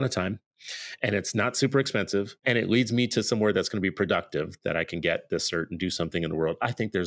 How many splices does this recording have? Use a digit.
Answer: 1